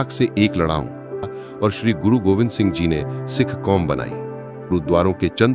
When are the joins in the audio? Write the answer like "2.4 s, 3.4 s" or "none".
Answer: 1.4 s, 4.7 s